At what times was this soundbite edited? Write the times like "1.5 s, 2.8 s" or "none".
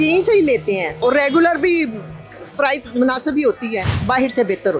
1.0 s, 3.9 s